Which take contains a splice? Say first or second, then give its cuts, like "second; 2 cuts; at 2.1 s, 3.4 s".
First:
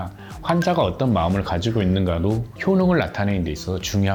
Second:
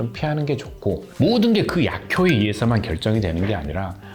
second; 1 cut; at 1.1 s